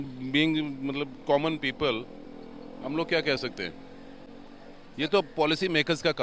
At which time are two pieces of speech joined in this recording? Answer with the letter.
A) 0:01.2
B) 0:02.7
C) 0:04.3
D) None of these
D